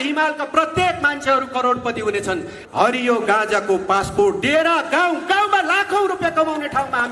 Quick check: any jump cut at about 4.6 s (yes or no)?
no